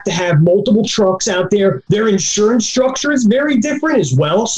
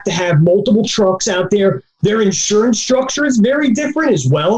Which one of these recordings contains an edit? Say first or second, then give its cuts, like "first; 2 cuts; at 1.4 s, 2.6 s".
first; 1 cut; at 1.8 s